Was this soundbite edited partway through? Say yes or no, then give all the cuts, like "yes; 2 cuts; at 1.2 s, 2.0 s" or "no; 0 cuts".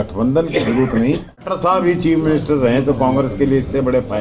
yes; 1 cut; at 1.4 s